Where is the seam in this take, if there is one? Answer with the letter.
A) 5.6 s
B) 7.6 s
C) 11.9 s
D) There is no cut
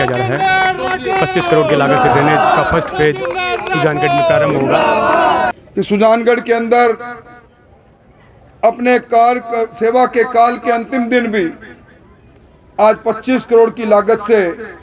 A